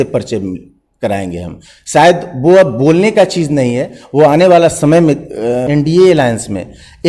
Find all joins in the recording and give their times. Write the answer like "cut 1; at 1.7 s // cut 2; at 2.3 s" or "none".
cut 1; at 5.6 s